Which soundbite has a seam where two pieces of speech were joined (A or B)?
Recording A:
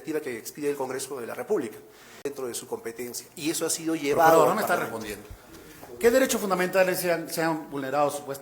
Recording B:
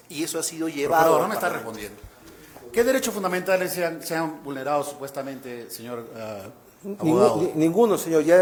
A